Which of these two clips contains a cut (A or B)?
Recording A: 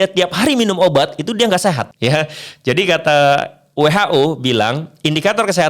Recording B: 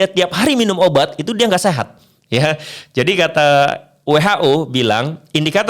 A